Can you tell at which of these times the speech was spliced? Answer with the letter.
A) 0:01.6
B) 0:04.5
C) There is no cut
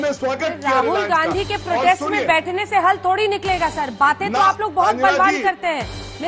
C